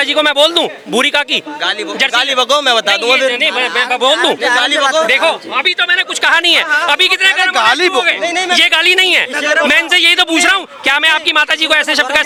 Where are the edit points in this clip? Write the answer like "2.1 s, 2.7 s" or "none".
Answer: none